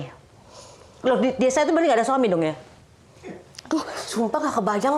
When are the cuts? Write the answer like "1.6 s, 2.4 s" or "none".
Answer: none